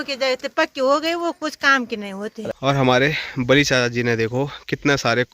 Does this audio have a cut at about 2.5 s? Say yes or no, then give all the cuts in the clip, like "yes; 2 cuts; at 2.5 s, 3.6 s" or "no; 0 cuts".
yes; 1 cut; at 2.5 s